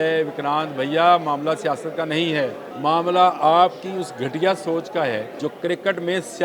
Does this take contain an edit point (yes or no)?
yes